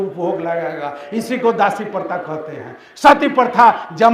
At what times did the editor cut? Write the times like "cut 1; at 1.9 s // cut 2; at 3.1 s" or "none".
none